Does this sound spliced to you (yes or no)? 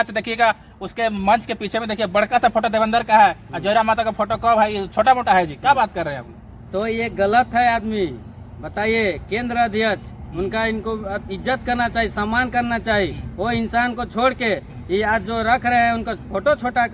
no